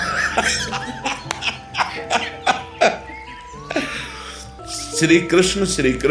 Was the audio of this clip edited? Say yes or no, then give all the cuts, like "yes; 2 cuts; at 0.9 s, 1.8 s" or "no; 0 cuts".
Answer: yes; 1 cut; at 4.6 s